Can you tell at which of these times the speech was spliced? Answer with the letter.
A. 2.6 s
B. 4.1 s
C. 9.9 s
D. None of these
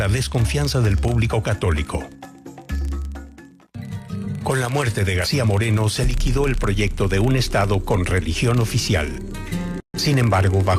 A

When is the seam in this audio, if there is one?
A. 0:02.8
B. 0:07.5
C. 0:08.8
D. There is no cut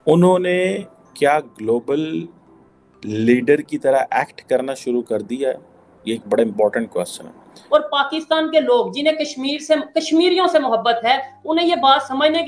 B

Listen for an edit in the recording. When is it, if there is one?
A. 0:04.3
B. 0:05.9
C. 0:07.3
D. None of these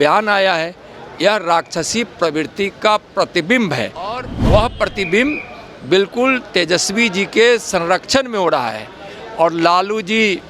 A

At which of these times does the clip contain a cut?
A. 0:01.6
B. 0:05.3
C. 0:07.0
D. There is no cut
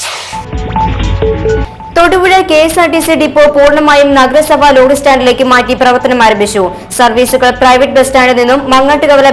A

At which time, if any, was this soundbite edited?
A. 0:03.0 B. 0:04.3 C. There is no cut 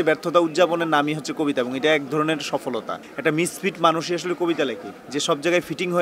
A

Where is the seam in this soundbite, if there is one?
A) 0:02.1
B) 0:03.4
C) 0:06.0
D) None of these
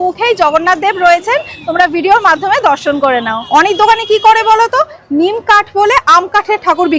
B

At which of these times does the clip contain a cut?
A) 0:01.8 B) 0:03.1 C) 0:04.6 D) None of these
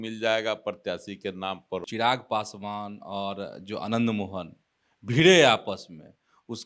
A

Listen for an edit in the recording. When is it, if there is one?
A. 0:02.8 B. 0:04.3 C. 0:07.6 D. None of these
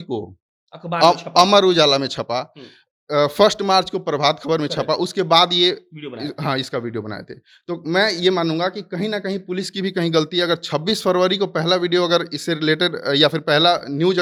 D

